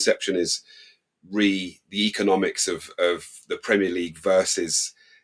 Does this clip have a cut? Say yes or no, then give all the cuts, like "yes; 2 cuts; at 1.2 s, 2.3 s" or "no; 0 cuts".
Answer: no; 0 cuts